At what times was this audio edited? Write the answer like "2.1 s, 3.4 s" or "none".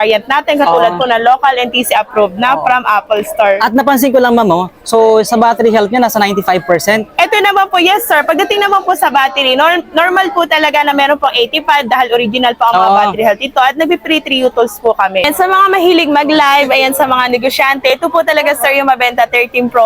15.3 s